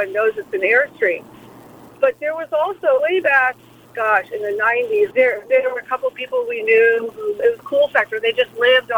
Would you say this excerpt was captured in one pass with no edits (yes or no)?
yes